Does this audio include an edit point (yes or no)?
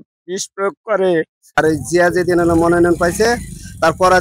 yes